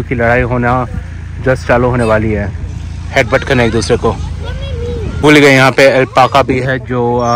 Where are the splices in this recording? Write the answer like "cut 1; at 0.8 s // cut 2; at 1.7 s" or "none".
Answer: cut 1; at 5.1 s